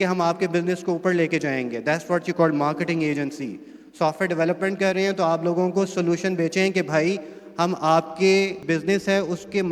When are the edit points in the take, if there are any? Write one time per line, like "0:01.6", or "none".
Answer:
0:08.6